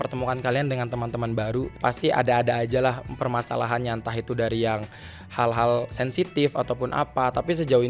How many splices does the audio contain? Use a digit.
1